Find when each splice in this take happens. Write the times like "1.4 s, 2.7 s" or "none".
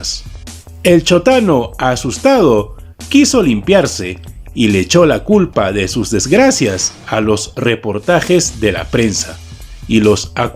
3.4 s